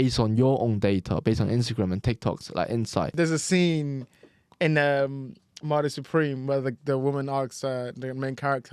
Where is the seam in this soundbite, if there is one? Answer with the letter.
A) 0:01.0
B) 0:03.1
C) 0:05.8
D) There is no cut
B